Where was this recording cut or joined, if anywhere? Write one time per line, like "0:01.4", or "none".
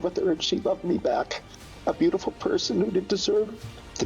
0:01.8